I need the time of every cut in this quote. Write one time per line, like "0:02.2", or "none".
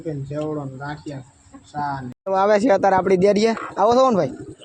0:02.4